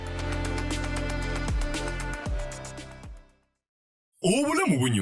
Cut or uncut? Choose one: cut